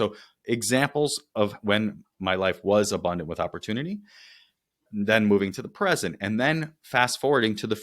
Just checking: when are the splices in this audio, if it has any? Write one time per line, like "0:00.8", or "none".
0:04.9